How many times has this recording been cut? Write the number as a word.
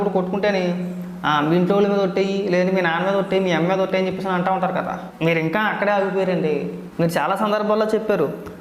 two